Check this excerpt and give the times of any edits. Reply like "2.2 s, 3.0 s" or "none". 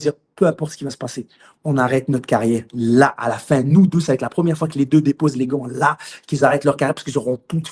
none